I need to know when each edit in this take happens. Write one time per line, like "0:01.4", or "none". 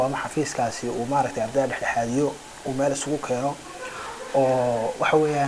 none